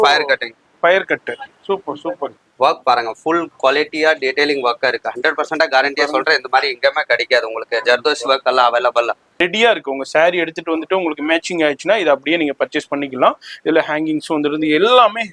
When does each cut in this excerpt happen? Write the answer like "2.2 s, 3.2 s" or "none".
2.4 s, 9.3 s